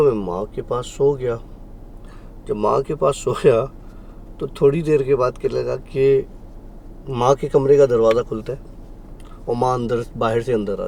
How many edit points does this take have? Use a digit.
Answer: 0